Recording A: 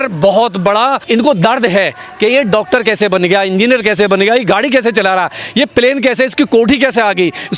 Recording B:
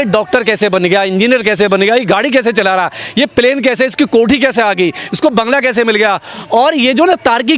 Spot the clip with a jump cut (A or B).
A